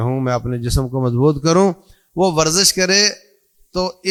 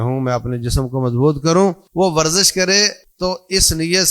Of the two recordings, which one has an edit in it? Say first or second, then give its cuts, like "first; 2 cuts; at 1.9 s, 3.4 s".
second; 2 cuts; at 1.8 s, 3.0 s